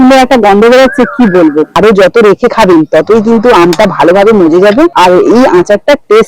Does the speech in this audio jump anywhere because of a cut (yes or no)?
yes